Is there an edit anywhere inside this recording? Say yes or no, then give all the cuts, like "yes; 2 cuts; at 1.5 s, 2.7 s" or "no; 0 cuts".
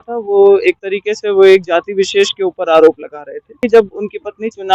yes; 1 cut; at 3.6 s